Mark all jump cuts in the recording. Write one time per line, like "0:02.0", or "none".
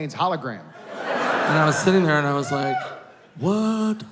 0:01.5